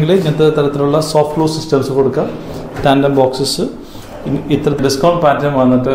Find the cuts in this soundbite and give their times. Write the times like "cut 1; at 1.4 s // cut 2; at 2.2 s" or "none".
cut 1; at 4.8 s

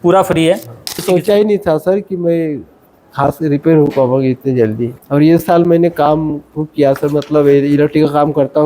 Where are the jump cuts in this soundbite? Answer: cut 1; at 1.0 s // cut 2; at 4.9 s

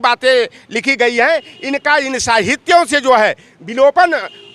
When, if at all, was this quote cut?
none

